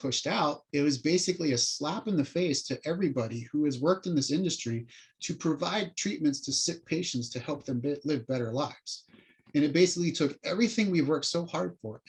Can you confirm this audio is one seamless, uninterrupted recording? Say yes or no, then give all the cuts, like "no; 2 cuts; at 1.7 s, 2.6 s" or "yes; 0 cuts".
yes; 0 cuts